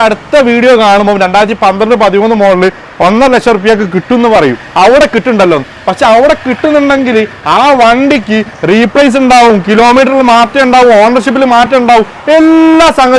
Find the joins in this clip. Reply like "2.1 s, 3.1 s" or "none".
none